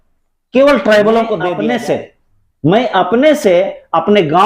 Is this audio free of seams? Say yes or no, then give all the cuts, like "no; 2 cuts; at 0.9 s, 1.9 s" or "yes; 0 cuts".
no; 1 cut; at 1.5 s